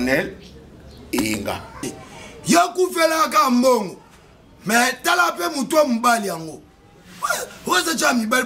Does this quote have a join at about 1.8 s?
yes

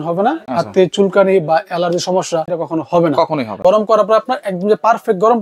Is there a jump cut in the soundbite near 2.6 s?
yes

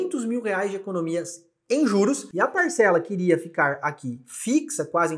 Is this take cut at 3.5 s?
no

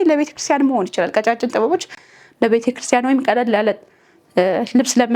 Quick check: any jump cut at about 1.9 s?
no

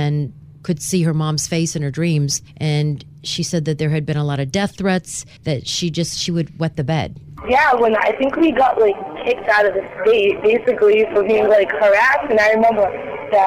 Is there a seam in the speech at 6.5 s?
no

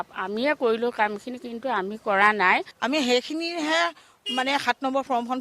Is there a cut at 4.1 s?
no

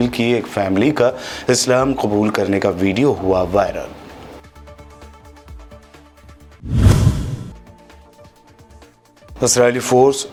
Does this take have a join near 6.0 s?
no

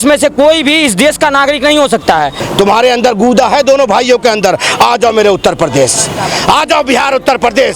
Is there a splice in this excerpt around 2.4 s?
yes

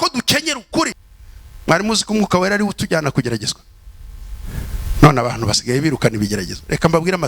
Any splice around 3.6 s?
no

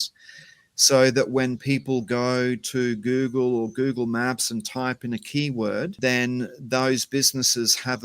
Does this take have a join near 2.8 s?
no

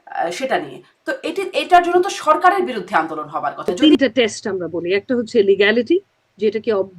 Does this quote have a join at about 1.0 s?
no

